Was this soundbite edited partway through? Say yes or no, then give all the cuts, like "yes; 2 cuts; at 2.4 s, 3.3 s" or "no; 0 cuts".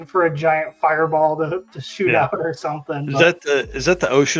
no; 0 cuts